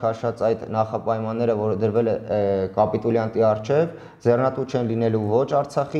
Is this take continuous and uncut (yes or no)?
yes